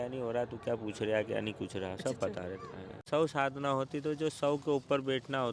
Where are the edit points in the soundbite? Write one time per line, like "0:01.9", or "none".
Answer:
0:03.0